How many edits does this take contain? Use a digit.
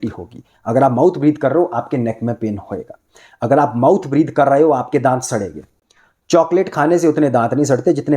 0